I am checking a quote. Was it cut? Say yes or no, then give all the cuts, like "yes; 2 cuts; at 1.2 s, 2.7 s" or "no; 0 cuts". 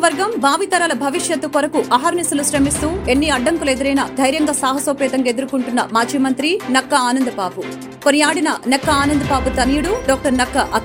no; 0 cuts